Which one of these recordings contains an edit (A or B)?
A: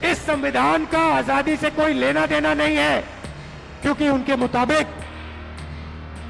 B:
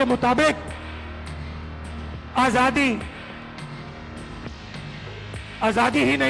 B